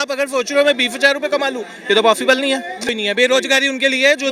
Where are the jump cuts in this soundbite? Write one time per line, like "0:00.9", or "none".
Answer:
0:02.9